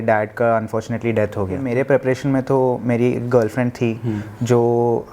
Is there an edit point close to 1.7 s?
yes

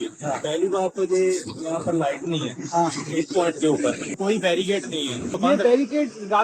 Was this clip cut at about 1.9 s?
no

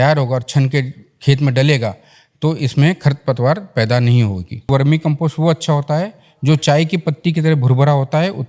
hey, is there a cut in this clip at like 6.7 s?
no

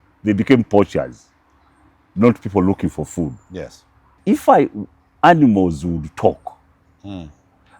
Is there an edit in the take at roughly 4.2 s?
yes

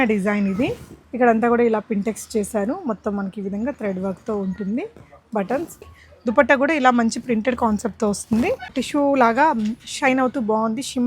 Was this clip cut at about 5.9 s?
yes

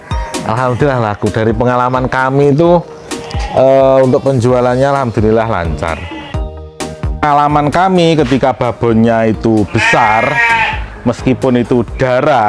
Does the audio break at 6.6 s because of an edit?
yes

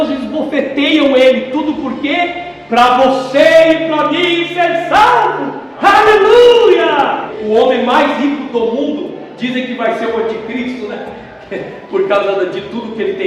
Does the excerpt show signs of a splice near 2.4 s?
no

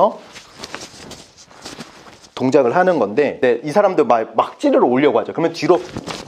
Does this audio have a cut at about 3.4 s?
yes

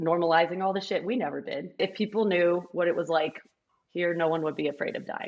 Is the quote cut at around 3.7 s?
no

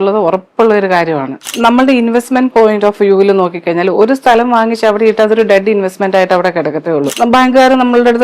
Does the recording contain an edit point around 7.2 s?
yes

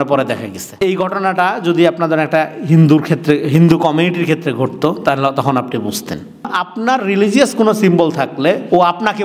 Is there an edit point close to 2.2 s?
no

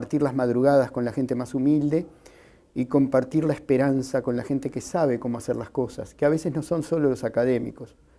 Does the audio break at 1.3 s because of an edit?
no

